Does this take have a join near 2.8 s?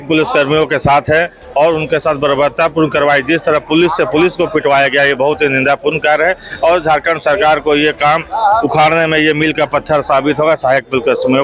no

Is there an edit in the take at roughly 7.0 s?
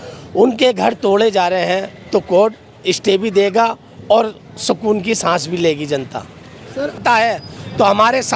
yes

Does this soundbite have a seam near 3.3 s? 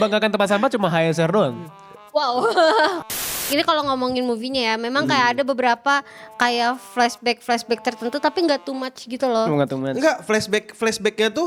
yes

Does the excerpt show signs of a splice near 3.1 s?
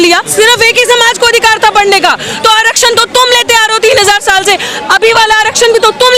no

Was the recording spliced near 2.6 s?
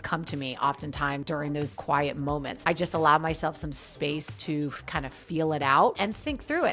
yes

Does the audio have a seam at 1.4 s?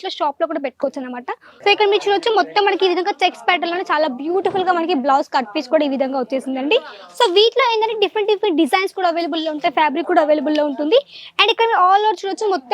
yes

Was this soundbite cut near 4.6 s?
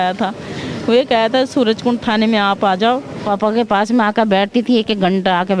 no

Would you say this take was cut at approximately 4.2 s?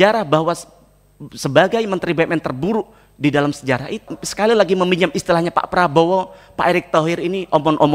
yes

